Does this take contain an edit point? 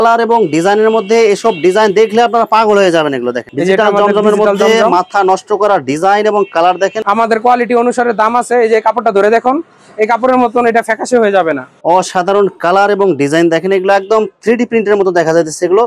yes; 3 cuts; at 3.4 s, 7.0 s, 11.7 s

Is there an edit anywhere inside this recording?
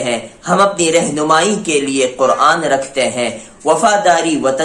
no; 0 cuts

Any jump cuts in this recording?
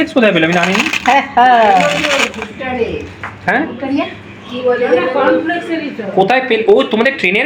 no; 0 cuts

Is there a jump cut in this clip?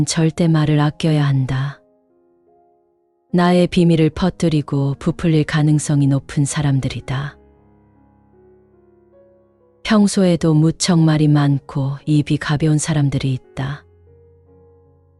no; 0 cuts

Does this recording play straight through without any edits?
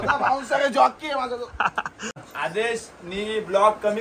no; 1 cut; at 2.2 s

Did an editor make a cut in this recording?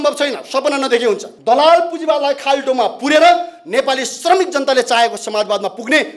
yes; 1 cut; at 1.3 s

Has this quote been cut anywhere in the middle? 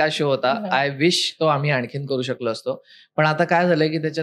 no; 0 cuts

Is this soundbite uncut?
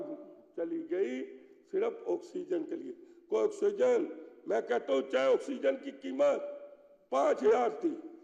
yes; 0 cuts

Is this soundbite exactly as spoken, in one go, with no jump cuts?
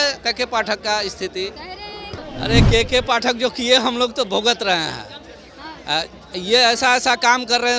no; 1 cut; at 2.3 s

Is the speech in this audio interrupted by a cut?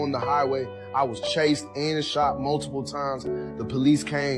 yes; 1 cut; at 2.2 s

